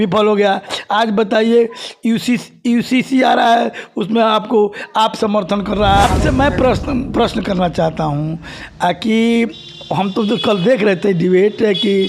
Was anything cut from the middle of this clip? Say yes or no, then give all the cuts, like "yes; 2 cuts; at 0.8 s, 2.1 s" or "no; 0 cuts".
yes; 1 cut; at 6.0 s